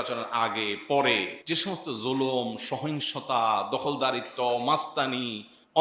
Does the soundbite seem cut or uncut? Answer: cut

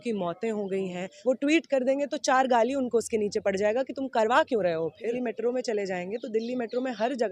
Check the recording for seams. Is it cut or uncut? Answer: cut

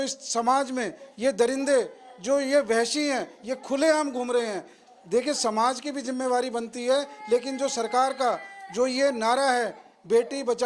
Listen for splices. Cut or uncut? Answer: uncut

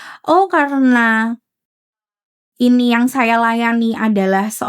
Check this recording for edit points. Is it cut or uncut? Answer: cut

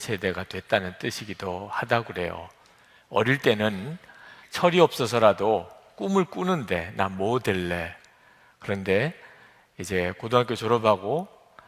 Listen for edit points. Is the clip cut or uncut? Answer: cut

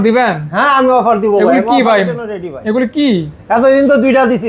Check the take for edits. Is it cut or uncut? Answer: uncut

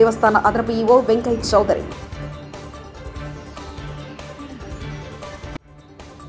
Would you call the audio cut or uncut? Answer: uncut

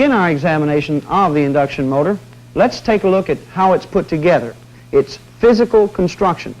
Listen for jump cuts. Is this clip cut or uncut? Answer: cut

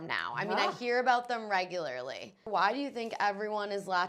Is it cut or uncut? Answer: cut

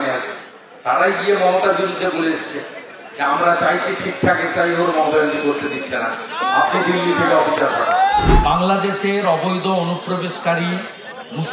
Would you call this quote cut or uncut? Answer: cut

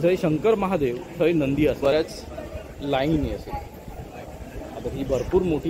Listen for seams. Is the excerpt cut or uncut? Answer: cut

